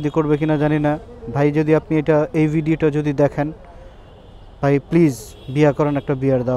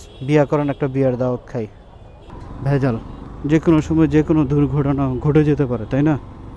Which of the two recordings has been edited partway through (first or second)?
second